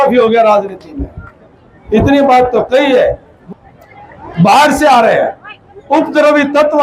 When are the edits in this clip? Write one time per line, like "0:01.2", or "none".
0:03.3